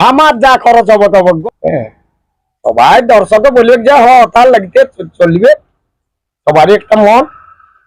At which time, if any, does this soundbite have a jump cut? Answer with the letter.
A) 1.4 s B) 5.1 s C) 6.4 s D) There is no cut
A